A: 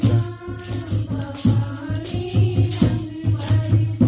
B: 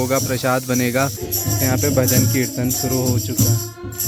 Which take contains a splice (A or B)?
B